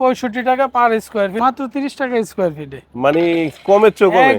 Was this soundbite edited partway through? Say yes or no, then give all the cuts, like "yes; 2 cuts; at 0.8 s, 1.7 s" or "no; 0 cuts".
yes; 1 cut; at 1.4 s